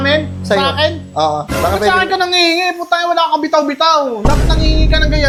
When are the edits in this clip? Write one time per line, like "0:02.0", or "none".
none

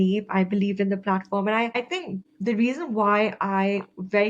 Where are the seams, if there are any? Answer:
0:01.8

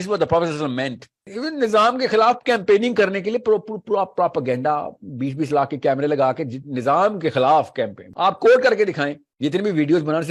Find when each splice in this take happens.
0:01.3
0:08.0
0:09.2

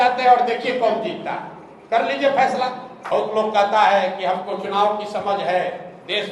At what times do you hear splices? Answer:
0:03.0

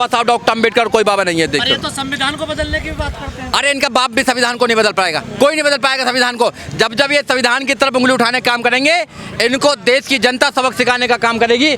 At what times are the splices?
none

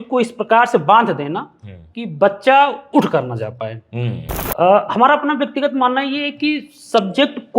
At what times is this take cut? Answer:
0:04.2

